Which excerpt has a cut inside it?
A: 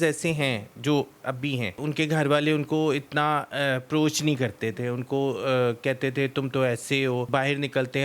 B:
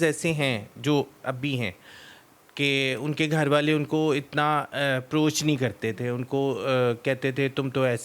A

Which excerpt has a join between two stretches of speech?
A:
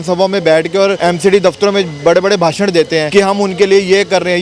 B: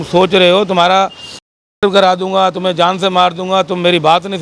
A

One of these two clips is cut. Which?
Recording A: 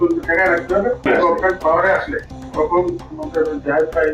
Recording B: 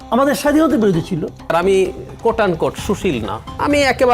B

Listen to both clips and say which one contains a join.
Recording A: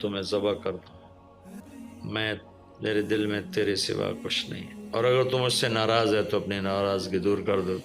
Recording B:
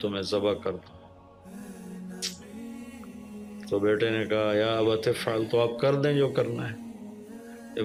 A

